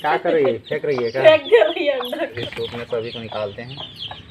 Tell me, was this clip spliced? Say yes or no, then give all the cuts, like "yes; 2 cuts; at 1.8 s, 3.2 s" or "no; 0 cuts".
yes; 1 cut; at 2.4 s